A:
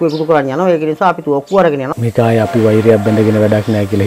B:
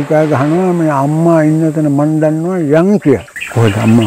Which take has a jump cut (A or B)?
A